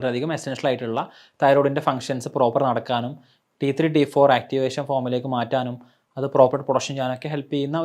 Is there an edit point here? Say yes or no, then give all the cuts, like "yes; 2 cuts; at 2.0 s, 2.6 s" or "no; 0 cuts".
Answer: no; 0 cuts